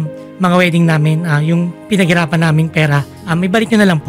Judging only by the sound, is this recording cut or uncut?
cut